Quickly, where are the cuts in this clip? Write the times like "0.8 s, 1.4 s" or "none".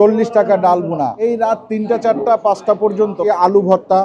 1.2 s, 3.2 s